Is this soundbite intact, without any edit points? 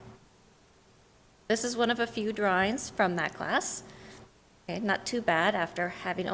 no; 1 cut; at 2.3 s

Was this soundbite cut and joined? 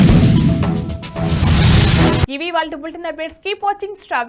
no; 0 cuts

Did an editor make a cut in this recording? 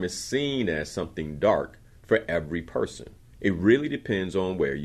no; 0 cuts

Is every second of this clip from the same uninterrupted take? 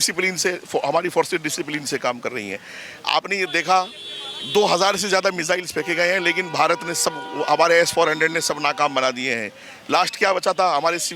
yes; 0 cuts

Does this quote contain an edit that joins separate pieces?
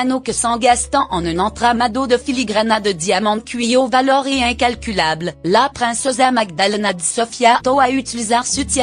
no; 0 cuts

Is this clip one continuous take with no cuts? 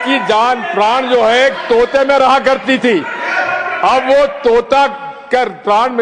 yes; 0 cuts

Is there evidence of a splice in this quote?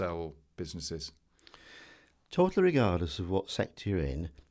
no; 0 cuts

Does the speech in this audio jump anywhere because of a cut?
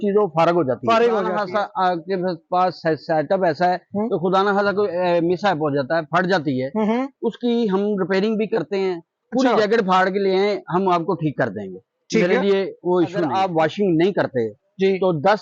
yes; 2 cuts; at 1.4 s, 13.3 s

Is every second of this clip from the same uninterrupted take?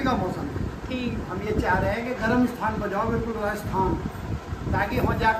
yes; 0 cuts

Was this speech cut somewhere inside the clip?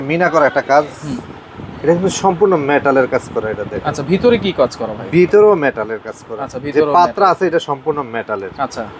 no; 0 cuts

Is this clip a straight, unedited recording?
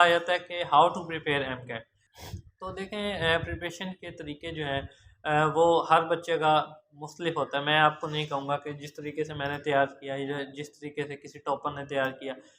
yes; 0 cuts

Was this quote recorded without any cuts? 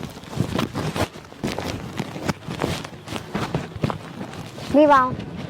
no; 2 cuts; at 1.2 s, 4.7 s

